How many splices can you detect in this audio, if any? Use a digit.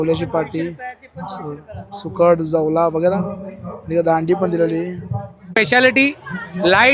1